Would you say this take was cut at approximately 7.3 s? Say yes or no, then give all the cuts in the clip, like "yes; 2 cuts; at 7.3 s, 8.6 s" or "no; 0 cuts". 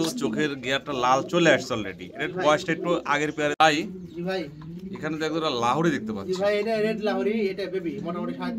no; 1 cut; at 3.5 s